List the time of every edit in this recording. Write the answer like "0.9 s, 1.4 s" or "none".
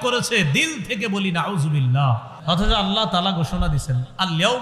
2.3 s